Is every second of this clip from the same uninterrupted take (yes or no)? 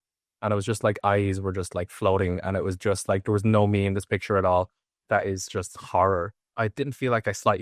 no